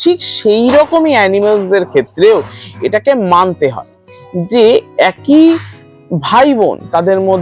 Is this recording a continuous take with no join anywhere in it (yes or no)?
yes